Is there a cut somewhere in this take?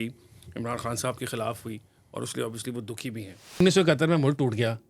yes; 1 cut; at 3.6 s

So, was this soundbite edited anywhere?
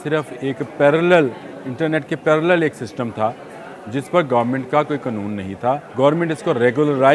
yes; 1 cut; at 5.9 s

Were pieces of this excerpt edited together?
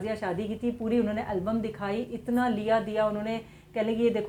no; 0 cuts

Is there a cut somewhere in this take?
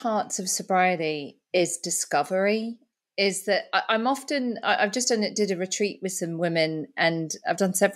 no; 0 cuts

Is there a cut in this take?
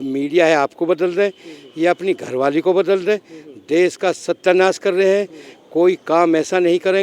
no; 0 cuts

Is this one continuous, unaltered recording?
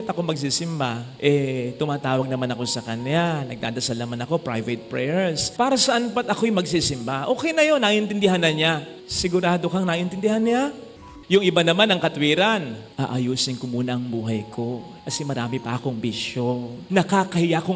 no; 4 cuts; at 5.4 s, 10.8 s, 12.8 s, 16.8 s

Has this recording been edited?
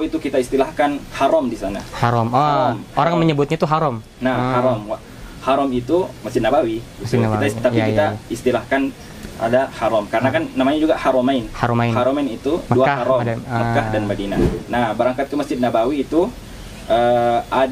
yes; 1 cut; at 14.5 s

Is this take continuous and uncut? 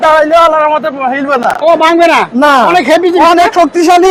yes; 0 cuts

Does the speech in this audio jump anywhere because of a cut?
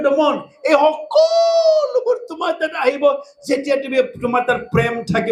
no; 0 cuts

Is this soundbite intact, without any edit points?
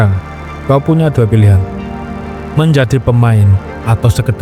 yes; 0 cuts

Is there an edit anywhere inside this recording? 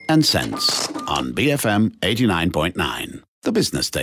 no; 0 cuts

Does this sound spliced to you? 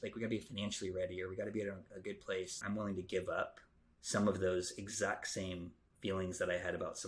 yes; 1 cut; at 2.6 s

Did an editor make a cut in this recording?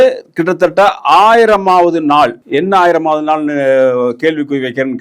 yes; 1 cut; at 2.4 s

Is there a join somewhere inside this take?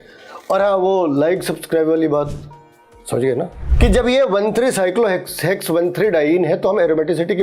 yes; 1 cut; at 3.6 s

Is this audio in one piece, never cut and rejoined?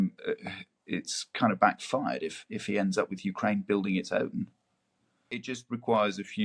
no; 1 cut; at 5.3 s

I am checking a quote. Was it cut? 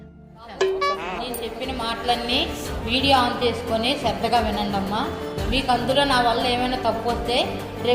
yes; 1 cut; at 1.3 s

